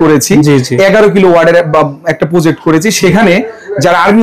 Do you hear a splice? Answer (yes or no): no